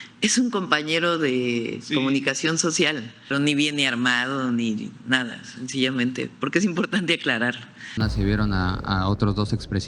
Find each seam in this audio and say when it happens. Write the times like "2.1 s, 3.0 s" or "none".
3.2 s, 8.0 s